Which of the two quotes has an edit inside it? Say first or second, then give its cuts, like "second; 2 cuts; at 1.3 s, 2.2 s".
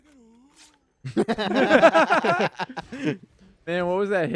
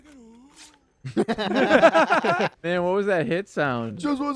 second; 1 cut; at 2.6 s